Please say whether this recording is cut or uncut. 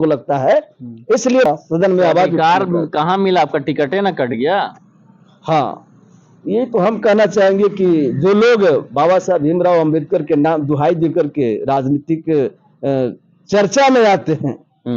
cut